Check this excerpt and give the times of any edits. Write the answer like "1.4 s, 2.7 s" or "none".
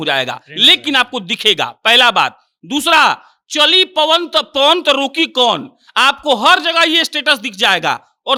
none